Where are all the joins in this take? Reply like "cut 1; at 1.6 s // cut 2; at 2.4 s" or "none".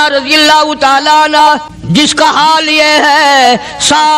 cut 1; at 1.7 s